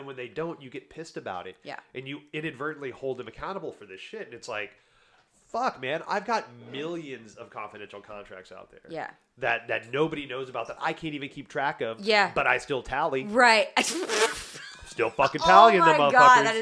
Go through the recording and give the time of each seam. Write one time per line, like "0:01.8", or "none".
none